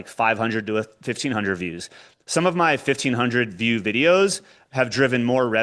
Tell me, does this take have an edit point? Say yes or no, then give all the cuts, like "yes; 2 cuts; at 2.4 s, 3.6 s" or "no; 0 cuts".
no; 0 cuts